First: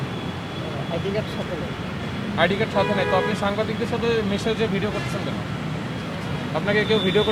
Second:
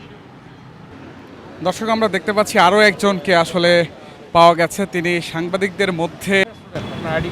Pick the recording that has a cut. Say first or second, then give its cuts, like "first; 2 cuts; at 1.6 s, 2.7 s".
second; 2 cuts; at 0.9 s, 6.4 s